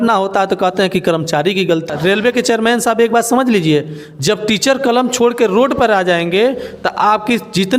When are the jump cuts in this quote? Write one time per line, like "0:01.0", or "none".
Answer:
0:01.9